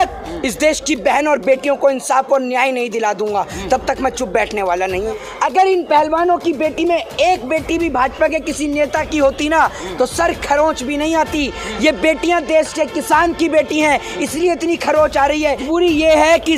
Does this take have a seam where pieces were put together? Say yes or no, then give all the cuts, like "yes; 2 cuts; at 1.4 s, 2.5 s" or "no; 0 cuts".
yes; 2 cuts; at 5.1 s, 15.6 s